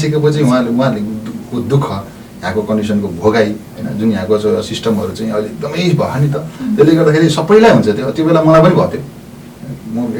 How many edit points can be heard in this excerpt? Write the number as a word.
zero